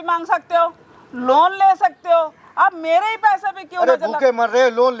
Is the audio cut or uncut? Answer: uncut